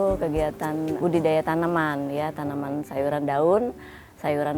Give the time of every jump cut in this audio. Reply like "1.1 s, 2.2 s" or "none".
0.9 s, 2.9 s